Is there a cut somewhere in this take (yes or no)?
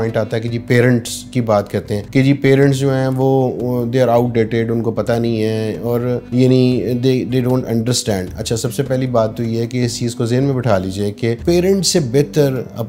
yes